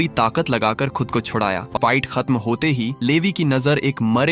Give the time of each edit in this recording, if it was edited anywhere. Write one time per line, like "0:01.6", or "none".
0:01.7